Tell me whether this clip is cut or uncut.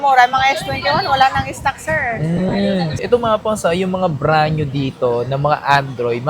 cut